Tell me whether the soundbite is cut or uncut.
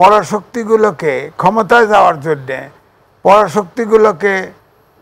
uncut